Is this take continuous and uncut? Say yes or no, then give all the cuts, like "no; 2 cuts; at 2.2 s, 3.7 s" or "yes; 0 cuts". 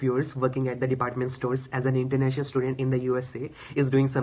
yes; 0 cuts